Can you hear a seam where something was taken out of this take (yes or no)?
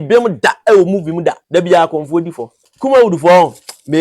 yes